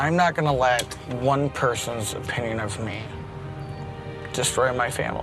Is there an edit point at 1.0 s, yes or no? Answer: yes